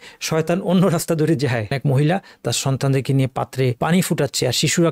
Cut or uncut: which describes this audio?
cut